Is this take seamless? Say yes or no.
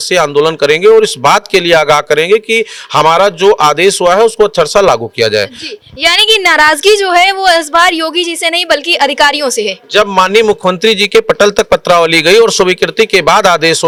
yes